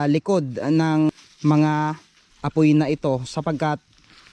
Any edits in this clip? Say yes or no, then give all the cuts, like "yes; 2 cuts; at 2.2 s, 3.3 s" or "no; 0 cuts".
yes; 1 cut; at 1.1 s